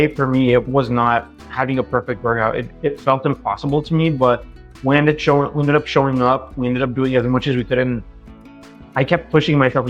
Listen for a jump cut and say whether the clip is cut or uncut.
uncut